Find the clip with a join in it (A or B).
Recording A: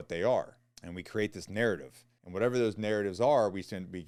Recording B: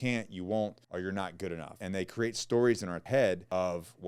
B